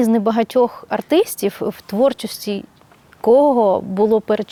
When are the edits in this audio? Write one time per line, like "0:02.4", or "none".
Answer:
none